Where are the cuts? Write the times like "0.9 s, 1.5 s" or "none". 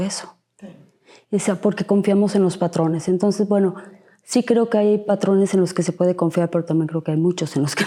none